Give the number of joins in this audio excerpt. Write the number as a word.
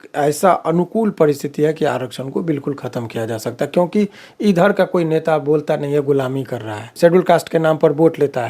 one